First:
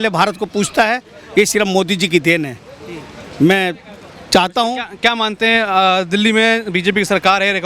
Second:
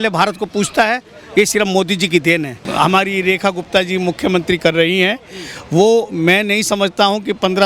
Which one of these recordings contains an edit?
second; 1 cut; at 2.6 s

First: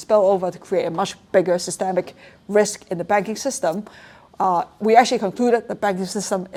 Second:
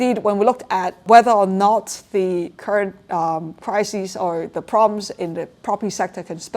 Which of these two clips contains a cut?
second; 1 cut; at 1.0 s

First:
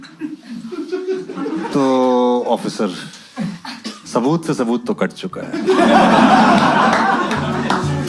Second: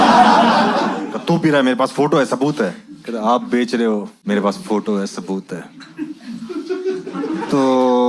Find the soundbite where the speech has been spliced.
second; 2 cuts; at 1.1 s, 4.2 s

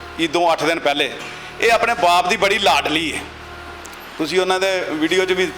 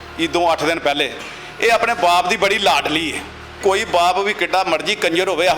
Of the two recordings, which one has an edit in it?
second; 1 cut; at 3.5 s

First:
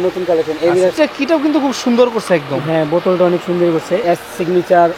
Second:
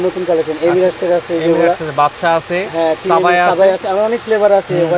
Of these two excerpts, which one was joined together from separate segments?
first; 2 cuts; at 1.0 s, 4.0 s

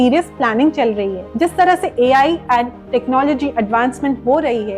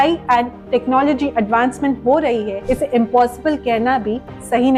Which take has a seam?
first; 1 cut; at 1.2 s

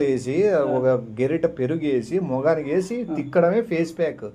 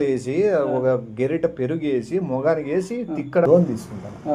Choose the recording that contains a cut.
second; 1 cut; at 3.5 s

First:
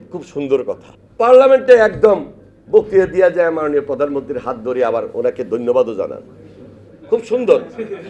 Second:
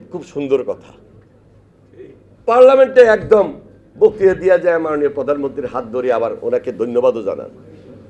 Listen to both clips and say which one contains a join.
first; 1 cut; at 1.0 s

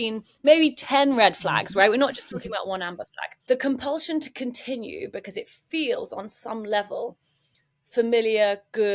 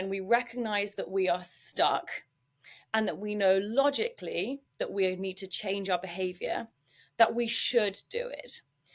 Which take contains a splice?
first; 1 cut; at 3.2 s

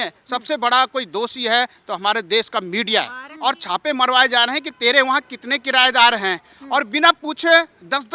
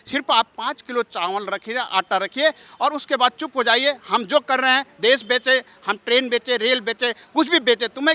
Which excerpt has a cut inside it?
first; 1 cut; at 3.2 s

